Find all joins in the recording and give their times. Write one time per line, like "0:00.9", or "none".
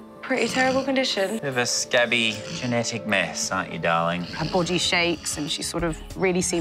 0:01.4
0:04.4